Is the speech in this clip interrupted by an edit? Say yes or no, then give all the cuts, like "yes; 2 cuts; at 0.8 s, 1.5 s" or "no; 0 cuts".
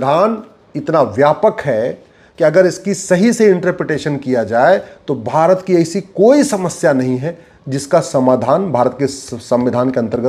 no; 0 cuts